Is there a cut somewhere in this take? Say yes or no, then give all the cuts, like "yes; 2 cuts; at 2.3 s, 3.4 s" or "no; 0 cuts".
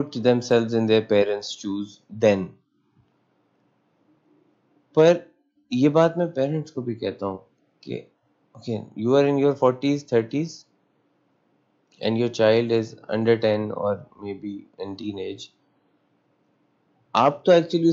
no; 0 cuts